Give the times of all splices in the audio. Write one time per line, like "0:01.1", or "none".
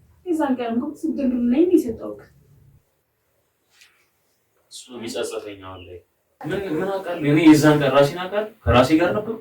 0:06.3